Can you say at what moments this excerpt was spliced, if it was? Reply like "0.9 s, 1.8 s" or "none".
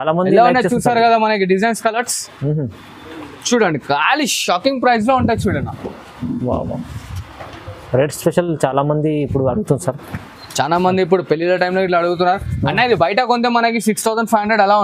none